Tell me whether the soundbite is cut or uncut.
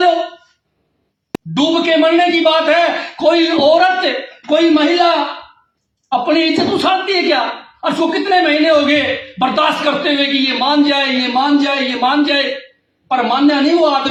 uncut